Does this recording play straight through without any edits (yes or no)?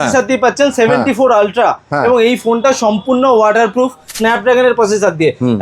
no